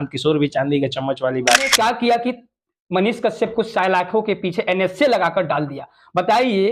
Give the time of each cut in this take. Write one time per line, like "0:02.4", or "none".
0:01.7